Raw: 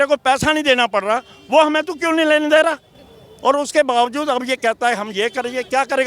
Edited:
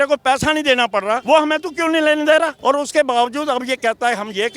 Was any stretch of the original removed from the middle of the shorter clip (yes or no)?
yes